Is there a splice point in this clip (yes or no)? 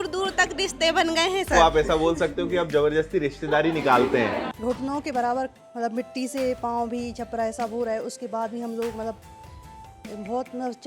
yes